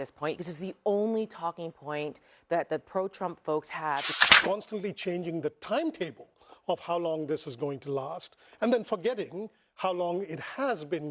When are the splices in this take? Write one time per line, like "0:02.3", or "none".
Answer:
0:04.1